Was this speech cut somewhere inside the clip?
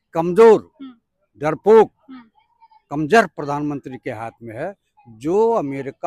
no; 0 cuts

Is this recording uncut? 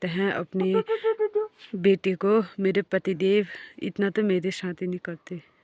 yes; 0 cuts

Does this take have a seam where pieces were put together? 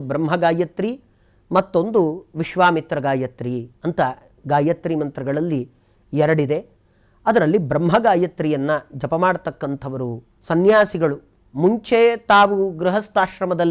no; 0 cuts

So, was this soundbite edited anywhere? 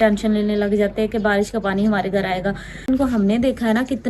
yes; 1 cut; at 2.9 s

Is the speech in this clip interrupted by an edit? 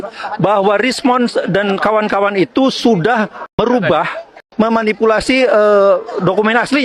yes; 2 cuts; at 3.6 s, 4.3 s

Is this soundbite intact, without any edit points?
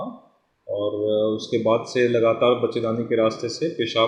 yes; 0 cuts

